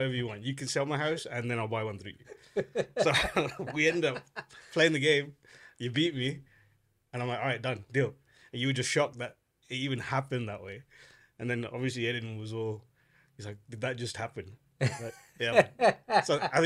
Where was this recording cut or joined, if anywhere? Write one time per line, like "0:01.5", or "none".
none